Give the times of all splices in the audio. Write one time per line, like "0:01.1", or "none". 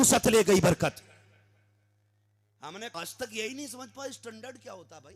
0:02.9